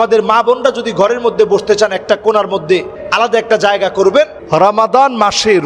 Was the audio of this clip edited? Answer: yes; 2 cuts; at 3.0 s, 4.4 s

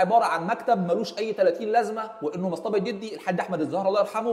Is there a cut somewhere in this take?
no; 0 cuts

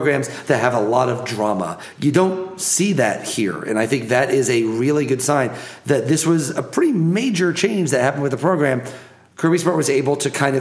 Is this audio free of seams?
no; 1 cut; at 1.8 s

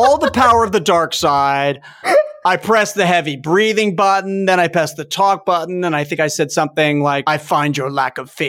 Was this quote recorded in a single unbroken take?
no; 1 cut; at 7.2 s

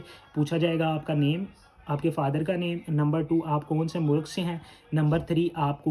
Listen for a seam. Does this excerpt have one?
no; 0 cuts

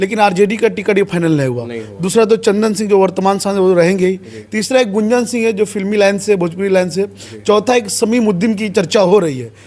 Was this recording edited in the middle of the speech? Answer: no; 0 cuts

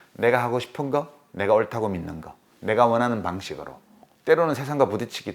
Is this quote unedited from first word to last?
yes; 0 cuts

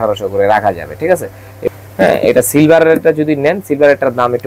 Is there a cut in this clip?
yes; 1 cut; at 1.5 s

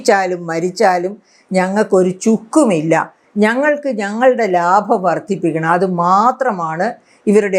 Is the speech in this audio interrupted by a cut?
no; 0 cuts

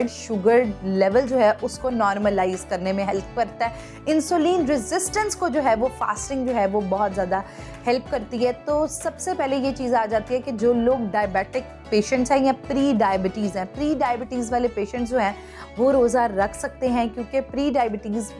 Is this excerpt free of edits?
yes; 0 cuts

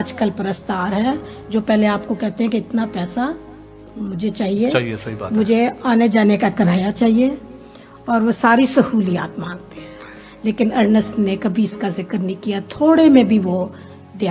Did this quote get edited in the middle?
no; 0 cuts

